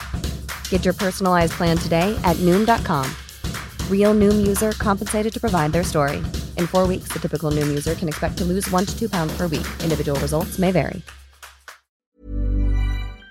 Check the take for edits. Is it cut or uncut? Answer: cut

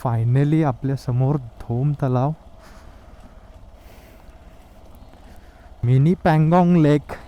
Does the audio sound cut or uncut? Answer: cut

